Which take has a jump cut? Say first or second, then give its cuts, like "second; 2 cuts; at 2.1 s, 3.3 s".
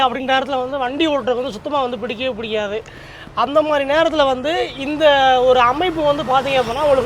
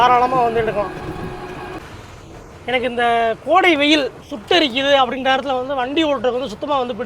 second; 1 cut; at 1.8 s